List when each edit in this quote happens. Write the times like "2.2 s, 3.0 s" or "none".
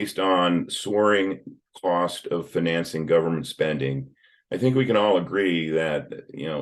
none